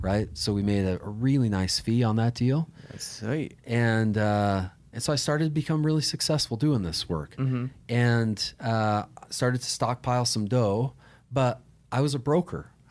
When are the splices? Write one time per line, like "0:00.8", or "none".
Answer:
none

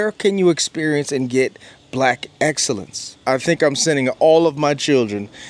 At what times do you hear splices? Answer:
0:03.1

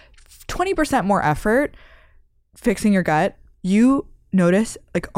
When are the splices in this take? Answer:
0:03.4

